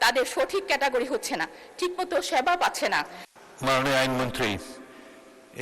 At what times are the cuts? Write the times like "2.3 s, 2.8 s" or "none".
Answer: 3.2 s